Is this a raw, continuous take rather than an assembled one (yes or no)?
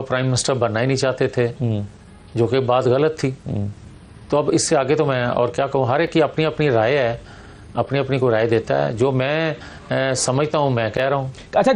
yes